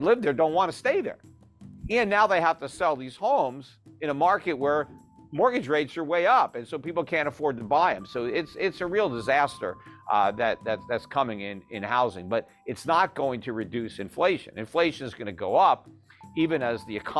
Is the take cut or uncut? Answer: uncut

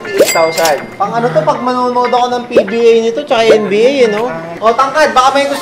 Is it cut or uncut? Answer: cut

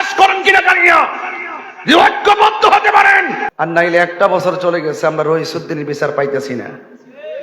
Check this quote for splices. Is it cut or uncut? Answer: cut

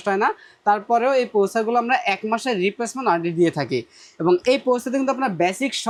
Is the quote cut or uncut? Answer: uncut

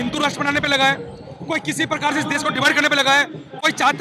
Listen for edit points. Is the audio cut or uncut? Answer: uncut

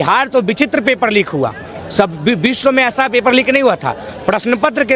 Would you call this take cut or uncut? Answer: uncut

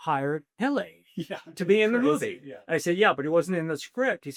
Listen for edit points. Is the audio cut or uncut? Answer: uncut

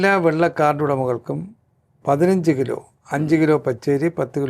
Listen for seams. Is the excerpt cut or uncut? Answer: uncut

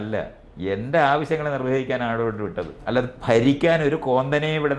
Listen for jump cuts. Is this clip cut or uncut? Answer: cut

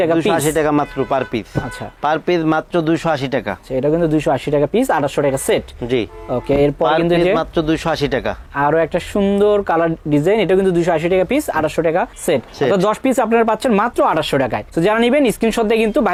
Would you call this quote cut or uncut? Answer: uncut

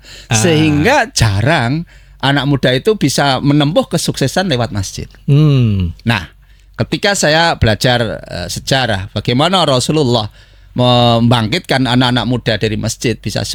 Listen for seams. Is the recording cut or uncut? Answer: uncut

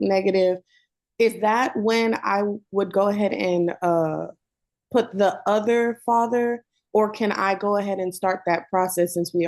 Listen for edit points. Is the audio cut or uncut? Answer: uncut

